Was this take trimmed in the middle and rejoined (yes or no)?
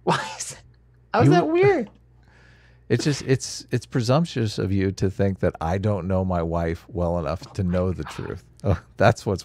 no